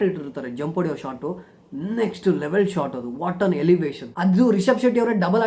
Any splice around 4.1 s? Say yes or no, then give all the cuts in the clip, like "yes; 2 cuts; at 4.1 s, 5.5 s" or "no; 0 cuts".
yes; 1 cut; at 4.1 s